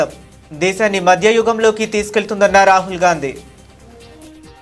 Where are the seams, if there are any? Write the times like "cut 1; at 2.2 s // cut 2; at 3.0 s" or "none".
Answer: cut 1; at 3.7 s